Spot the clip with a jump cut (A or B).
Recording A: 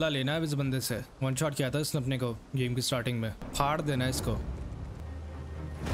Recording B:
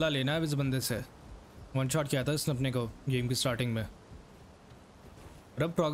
A